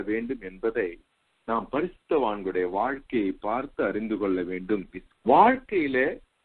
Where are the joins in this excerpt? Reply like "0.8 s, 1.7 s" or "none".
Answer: 4.9 s